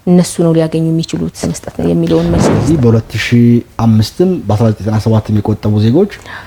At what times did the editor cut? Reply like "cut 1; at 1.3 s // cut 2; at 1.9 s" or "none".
cut 1; at 2.5 s